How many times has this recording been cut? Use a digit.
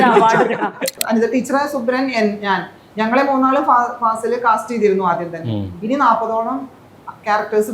1